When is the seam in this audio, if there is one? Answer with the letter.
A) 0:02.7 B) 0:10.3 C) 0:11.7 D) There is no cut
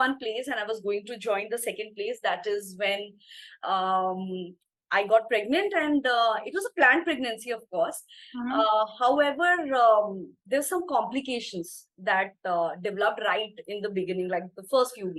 D